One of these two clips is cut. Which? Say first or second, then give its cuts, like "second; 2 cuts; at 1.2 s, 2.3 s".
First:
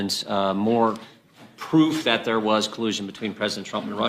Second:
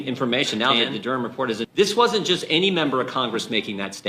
second; 1 cut; at 1.7 s